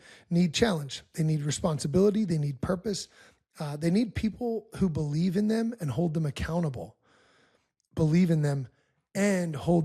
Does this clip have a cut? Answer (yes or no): no